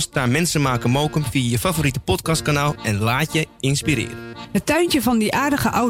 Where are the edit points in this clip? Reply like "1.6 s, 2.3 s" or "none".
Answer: 4.3 s